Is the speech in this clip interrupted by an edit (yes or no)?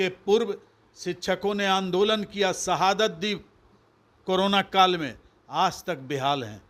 no